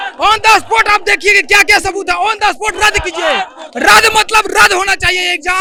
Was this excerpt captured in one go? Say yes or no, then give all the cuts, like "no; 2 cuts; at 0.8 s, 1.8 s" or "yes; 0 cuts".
yes; 0 cuts